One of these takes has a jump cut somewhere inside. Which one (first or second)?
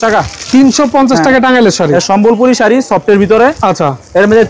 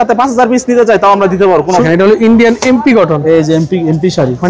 second